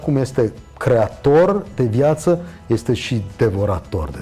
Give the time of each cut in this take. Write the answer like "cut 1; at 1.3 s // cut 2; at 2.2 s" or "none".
none